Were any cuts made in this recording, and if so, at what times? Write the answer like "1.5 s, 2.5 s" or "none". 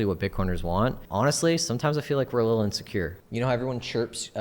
1.0 s, 3.2 s